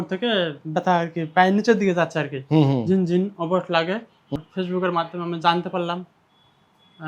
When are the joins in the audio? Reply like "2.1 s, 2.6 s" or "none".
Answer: 4.3 s